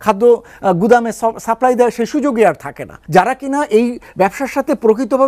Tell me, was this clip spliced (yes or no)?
yes